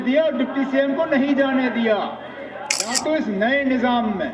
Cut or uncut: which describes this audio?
cut